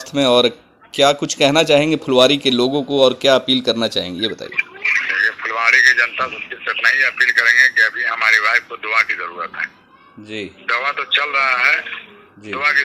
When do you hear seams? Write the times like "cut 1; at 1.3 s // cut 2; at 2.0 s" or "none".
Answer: none